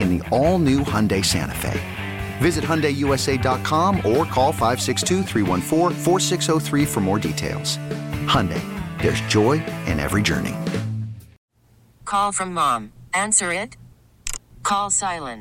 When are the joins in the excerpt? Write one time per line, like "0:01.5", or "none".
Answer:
0:11.3

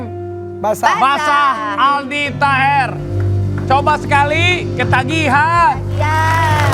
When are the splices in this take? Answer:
none

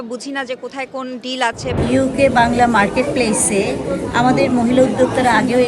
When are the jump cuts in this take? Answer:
0:01.8

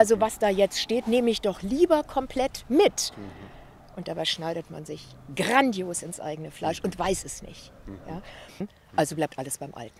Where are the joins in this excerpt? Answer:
0:08.6

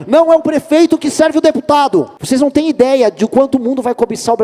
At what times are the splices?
0:02.2

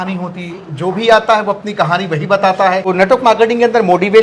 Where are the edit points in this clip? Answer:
0:02.9

